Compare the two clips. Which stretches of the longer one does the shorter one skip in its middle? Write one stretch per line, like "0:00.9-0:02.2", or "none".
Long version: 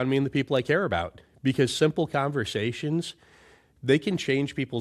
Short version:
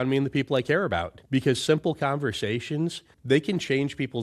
0:01.1-0:01.3
0:03.2-0:03.7